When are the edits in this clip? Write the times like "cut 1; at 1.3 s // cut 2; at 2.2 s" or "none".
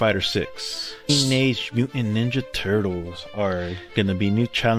cut 1; at 1.1 s